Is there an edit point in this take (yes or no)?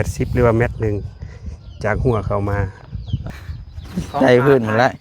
yes